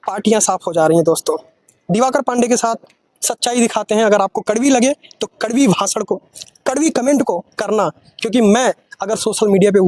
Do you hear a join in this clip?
no; 0 cuts

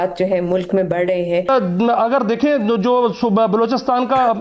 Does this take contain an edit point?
yes; 1 cut; at 1.4 s

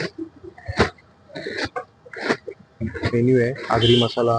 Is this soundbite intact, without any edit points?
no; 1 cut; at 3.1 s

